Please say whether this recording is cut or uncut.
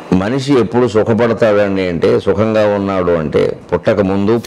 uncut